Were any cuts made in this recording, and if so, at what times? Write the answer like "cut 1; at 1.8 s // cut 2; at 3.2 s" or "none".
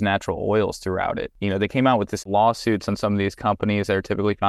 cut 1; at 1.3 s // cut 2; at 2.2 s